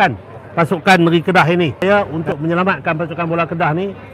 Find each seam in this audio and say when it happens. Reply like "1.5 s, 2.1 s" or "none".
1.8 s